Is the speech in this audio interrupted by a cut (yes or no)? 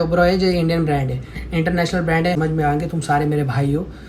yes